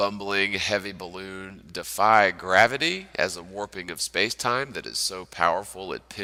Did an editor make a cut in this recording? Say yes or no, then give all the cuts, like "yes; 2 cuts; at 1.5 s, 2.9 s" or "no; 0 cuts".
no; 0 cuts